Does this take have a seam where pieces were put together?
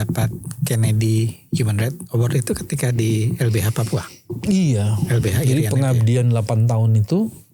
no; 0 cuts

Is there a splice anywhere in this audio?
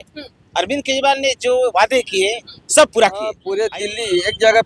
yes; 1 cut; at 3.4 s

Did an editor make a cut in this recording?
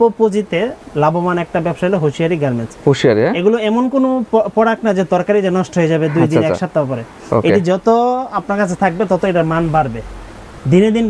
no; 0 cuts

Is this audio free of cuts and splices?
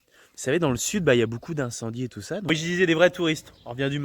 no; 1 cut; at 2.2 s

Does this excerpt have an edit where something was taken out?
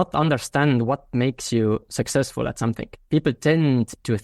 yes; 1 cut; at 2.9 s

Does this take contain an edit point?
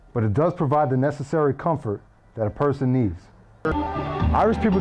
yes; 1 cut; at 3.7 s

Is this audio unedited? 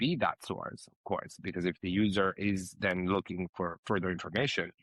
yes; 0 cuts

